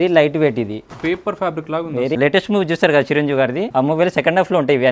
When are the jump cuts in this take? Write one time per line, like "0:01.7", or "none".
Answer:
0:02.2
0:03.7